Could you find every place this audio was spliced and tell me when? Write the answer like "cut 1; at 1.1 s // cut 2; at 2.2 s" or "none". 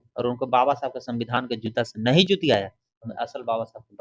none